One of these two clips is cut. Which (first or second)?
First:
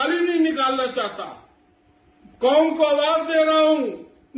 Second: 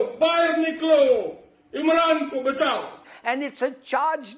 second